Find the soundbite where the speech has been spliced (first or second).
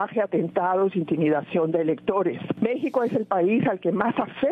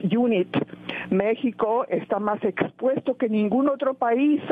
first